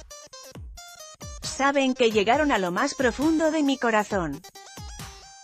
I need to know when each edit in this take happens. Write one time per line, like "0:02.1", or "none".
0:01.5
0:04.4